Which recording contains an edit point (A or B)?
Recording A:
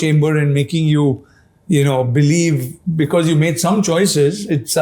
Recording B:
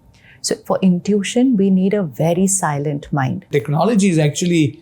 B